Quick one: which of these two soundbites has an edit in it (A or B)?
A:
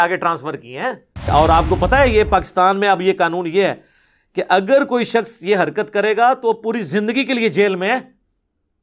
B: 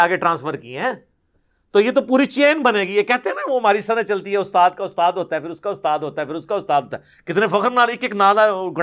A